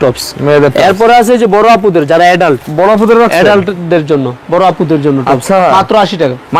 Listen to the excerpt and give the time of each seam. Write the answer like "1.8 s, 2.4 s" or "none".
none